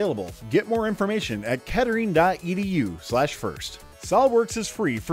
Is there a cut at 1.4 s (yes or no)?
no